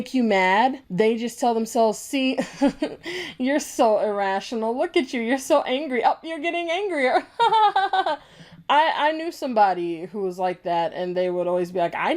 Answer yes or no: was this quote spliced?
no